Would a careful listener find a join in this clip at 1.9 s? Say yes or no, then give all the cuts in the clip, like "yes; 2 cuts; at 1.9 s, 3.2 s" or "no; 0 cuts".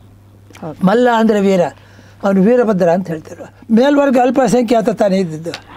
no; 1 cut; at 3.5 s